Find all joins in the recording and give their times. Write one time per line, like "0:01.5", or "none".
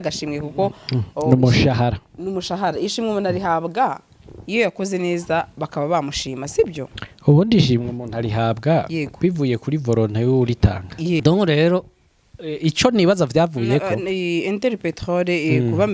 0:11.2